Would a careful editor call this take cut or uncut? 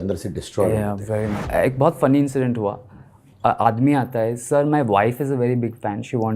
cut